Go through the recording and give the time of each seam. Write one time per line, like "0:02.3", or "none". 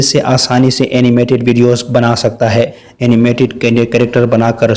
0:02.8